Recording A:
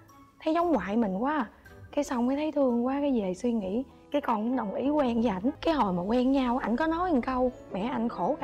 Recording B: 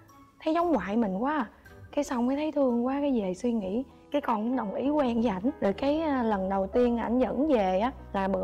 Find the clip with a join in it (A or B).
A